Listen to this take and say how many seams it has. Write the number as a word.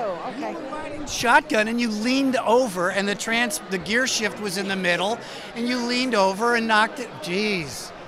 zero